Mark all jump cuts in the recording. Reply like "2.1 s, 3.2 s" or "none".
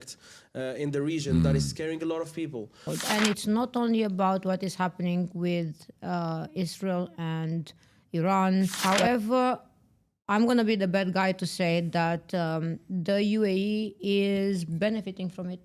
2.9 s, 8.8 s